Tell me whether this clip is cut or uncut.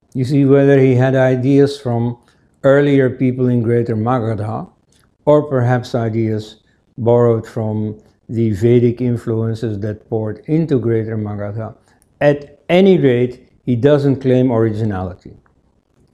uncut